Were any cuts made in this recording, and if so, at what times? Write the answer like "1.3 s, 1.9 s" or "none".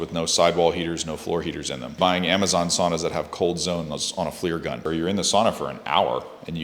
2.0 s, 4.8 s